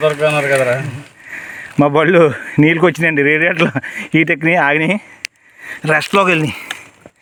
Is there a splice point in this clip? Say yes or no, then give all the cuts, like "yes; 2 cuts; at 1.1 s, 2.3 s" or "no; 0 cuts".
no; 0 cuts